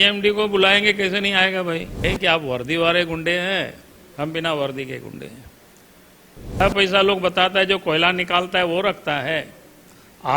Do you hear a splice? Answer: yes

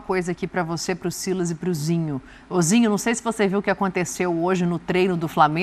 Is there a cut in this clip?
no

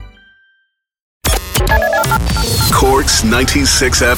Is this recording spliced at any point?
yes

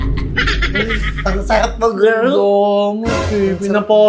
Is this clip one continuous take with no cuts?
yes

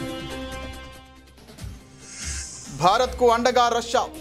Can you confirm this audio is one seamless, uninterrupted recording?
no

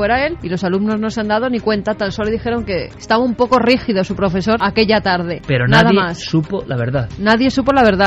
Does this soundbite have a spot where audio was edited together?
no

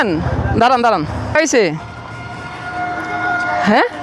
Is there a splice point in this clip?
yes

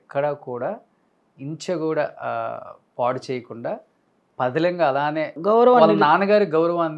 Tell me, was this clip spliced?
no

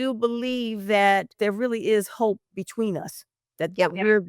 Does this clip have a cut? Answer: yes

